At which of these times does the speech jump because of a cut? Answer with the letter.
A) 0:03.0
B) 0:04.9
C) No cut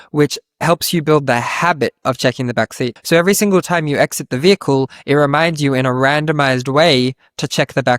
A